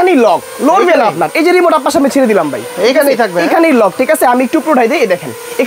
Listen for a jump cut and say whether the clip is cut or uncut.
uncut